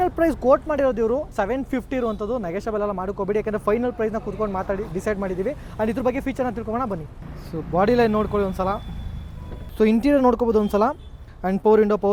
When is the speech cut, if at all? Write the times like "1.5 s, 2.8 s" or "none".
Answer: none